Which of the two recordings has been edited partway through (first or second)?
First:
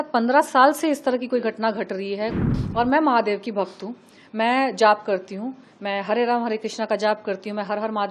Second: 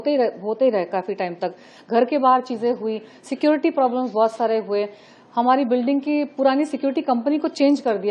first